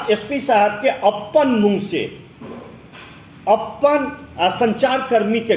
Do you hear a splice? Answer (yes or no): no